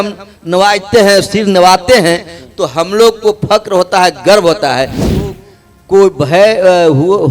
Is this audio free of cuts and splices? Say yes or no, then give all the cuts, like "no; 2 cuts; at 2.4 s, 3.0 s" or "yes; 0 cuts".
no; 1 cut; at 5.2 s